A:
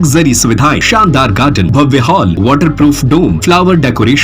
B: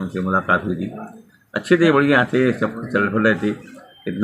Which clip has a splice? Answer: A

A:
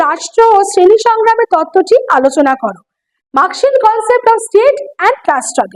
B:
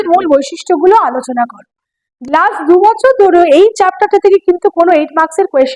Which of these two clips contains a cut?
B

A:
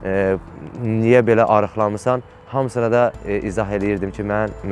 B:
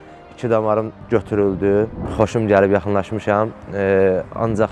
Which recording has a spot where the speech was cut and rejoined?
B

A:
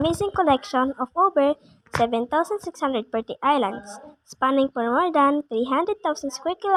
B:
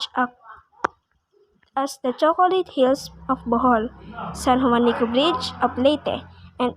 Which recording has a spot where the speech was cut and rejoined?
B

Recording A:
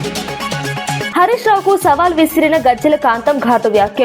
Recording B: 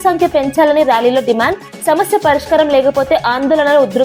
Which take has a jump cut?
A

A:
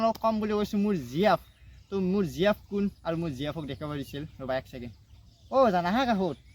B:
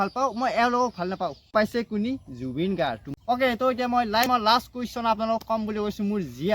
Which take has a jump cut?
B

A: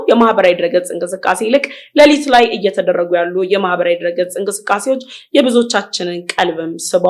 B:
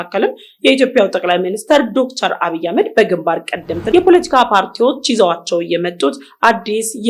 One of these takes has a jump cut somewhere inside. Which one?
B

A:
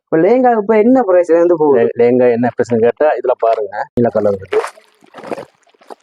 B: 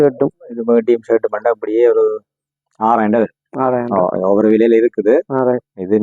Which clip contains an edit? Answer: A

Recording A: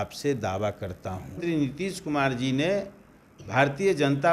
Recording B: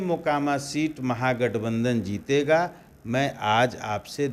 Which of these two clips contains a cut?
A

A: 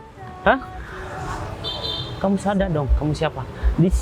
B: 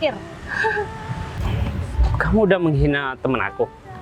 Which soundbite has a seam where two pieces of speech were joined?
B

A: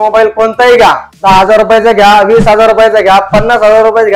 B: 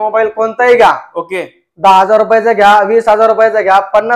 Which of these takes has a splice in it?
A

